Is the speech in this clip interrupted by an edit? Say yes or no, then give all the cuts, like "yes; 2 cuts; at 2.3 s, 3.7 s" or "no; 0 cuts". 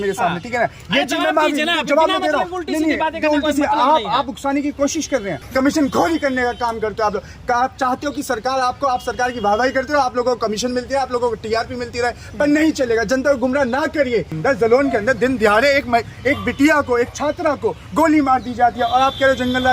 yes; 2 cuts; at 5.4 s, 14.3 s